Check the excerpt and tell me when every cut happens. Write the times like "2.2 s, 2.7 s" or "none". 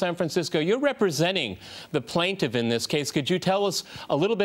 2.0 s